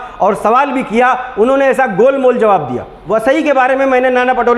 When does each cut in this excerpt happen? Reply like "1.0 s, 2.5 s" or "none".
2.9 s